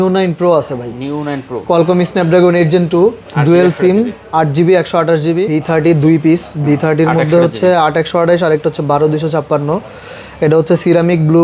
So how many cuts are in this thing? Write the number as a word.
one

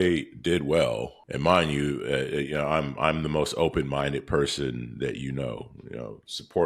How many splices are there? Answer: one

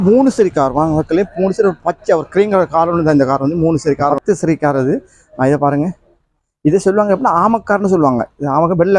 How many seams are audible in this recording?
one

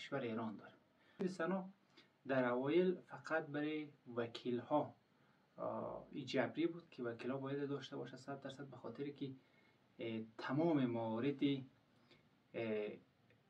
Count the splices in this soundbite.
one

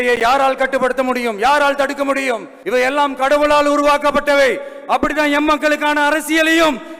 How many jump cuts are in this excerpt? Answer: one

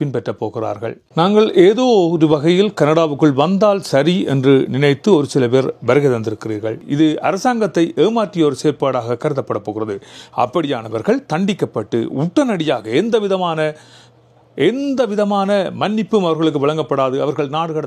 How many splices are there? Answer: two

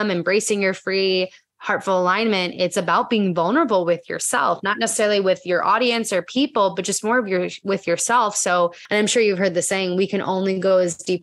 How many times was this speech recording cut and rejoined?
one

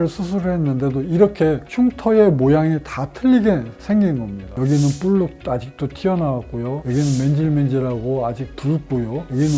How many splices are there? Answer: zero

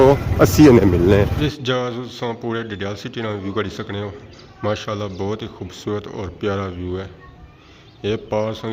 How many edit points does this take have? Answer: one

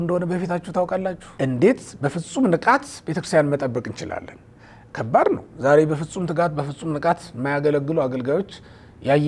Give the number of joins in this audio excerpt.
one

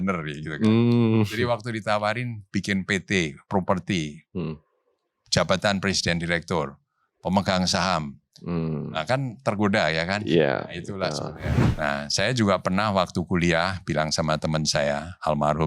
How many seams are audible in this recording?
one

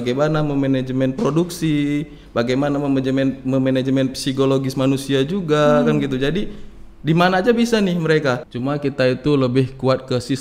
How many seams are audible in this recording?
one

